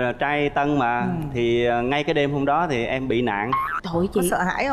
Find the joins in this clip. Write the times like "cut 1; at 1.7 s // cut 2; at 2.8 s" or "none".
cut 1; at 3.8 s